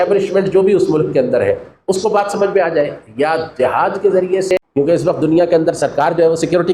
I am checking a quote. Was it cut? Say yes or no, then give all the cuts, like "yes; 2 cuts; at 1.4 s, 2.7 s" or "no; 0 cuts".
yes; 1 cut; at 4.6 s